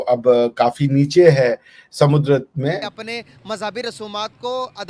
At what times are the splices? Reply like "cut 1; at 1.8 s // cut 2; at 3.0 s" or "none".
cut 1; at 2.9 s